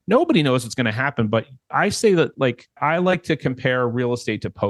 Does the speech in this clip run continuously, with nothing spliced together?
no; 2 cuts; at 1.6 s, 2.7 s

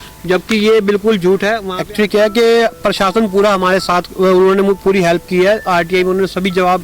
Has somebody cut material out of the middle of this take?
yes; 1 cut; at 1.7 s

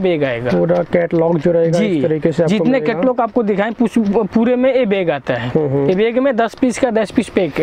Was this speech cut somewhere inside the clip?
no; 0 cuts

